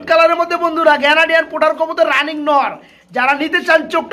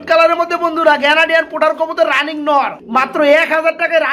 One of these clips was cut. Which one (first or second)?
second